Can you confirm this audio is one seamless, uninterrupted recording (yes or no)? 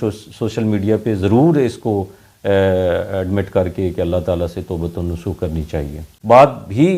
no